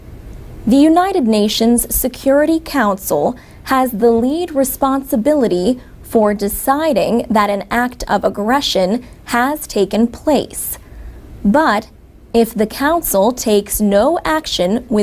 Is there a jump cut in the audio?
no; 0 cuts

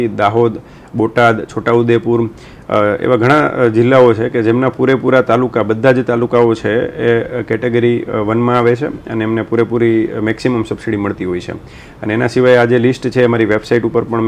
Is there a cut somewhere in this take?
no; 0 cuts

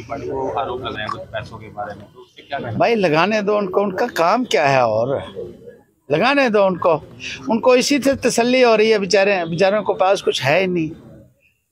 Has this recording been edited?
yes; 1 cut; at 0.9 s

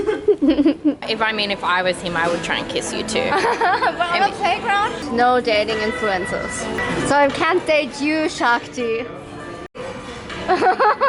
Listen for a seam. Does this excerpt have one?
yes; 4 cuts; at 1.0 s, 5.0 s, 6.8 s, 9.9 s

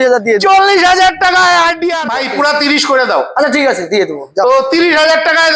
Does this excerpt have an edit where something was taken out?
yes; 1 cut; at 2.0 s

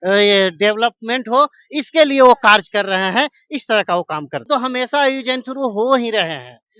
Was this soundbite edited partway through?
yes; 1 cut; at 4.4 s

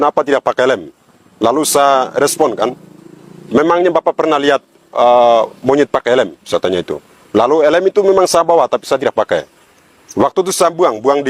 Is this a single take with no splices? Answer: yes; 0 cuts

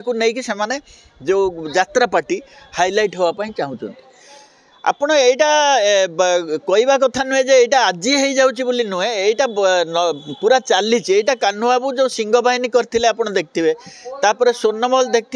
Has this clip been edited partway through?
no; 0 cuts

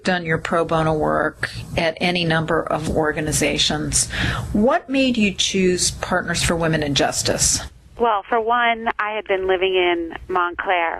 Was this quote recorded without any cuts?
no; 1 cut; at 5.4 s

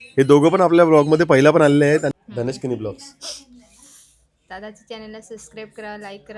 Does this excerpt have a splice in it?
yes; 1 cut; at 2.1 s

